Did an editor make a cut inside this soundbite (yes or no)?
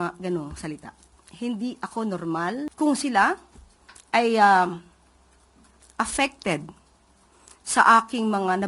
yes